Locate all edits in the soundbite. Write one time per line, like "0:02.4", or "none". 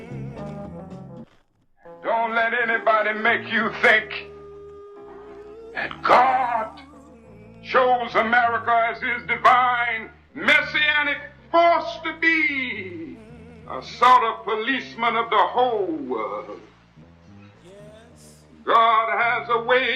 0:01.3